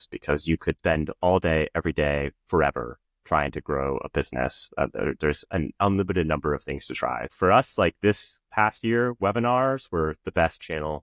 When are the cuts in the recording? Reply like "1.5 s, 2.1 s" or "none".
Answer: 0.8 s, 7.3 s